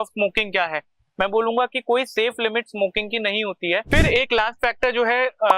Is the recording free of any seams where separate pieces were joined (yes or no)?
no